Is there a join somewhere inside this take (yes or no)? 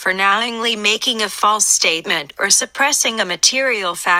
no